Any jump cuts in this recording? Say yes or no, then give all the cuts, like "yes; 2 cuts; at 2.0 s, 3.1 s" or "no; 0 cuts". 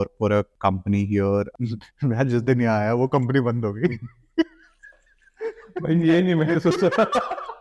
yes; 1 cut; at 1.6 s